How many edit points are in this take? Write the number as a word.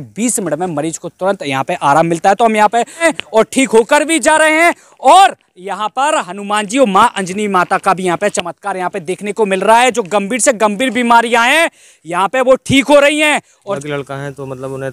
two